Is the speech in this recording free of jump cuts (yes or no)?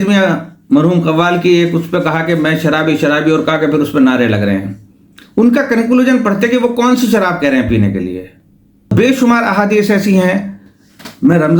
no